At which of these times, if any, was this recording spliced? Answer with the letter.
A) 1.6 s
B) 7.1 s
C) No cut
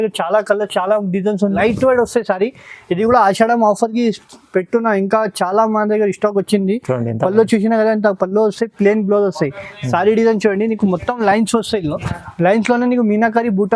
A